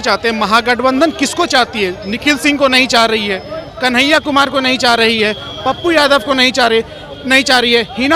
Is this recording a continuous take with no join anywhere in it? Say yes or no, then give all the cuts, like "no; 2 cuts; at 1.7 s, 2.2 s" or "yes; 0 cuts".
yes; 0 cuts